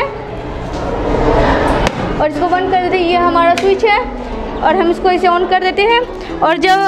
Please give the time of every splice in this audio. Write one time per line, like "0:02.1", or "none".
none